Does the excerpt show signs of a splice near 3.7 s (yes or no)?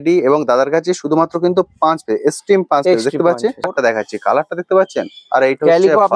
yes